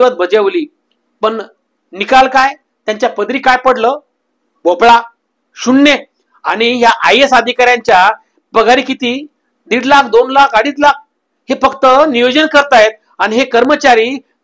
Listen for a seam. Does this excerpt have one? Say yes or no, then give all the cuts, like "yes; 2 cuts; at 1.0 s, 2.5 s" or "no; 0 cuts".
no; 0 cuts